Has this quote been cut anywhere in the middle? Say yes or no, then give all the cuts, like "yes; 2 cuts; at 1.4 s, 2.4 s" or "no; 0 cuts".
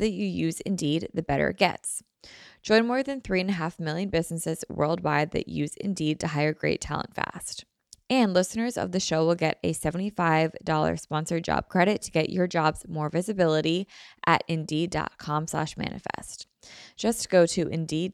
no; 0 cuts